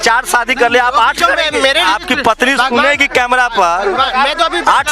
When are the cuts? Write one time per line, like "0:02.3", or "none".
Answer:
0:01.8